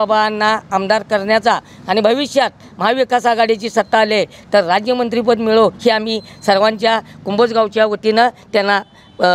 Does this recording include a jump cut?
no; 0 cuts

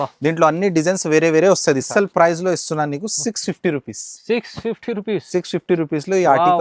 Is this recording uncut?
no; 1 cut; at 1.9 s

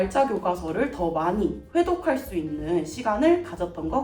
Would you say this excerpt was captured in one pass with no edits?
yes; 0 cuts

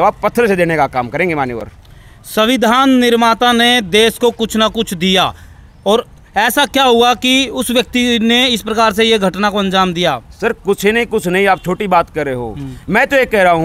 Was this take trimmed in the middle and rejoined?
no; 0 cuts

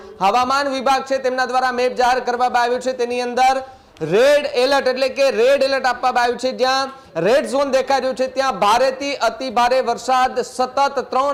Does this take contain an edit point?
no; 0 cuts

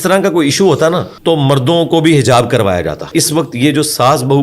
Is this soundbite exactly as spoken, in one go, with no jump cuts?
no; 2 cuts; at 1.1 s, 3.1 s

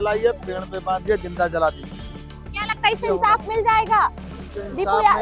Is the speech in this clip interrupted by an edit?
no; 0 cuts

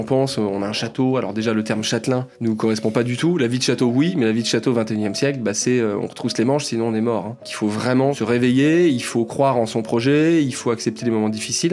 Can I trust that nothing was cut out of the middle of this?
no; 2 cuts; at 2.3 s, 7.9 s

